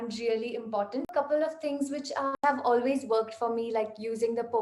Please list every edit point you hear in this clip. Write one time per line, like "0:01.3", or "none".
0:01.1
0:02.4